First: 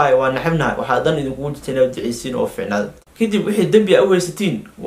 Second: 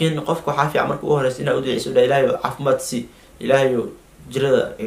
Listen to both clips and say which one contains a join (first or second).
first